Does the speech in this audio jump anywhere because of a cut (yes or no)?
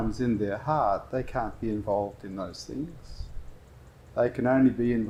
no